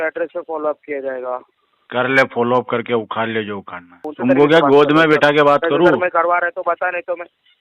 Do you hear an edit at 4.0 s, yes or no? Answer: yes